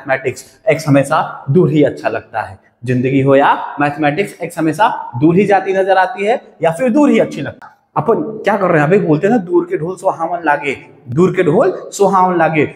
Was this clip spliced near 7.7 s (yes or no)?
yes